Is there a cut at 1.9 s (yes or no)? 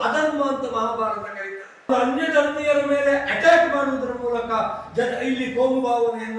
yes